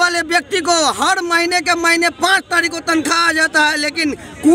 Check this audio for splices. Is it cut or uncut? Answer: uncut